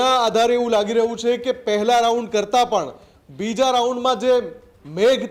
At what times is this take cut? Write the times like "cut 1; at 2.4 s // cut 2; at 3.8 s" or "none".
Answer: none